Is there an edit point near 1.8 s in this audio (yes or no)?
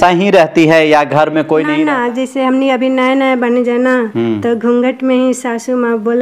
yes